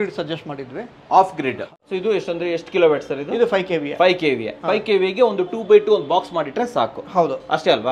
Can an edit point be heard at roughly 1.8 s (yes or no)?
yes